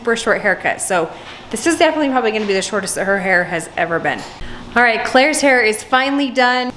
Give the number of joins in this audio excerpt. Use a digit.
1